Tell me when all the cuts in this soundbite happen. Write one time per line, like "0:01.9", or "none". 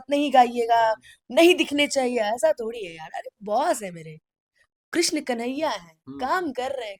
none